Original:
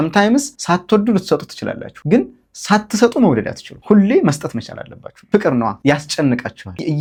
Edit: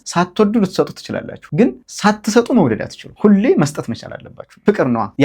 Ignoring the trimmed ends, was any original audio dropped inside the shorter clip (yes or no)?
yes